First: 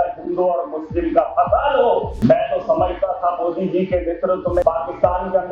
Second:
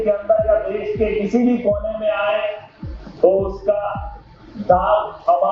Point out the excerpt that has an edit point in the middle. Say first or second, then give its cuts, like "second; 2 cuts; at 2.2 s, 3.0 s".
first; 2 cuts; at 2.1 s, 4.6 s